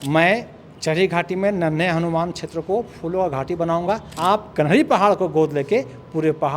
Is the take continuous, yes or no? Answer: no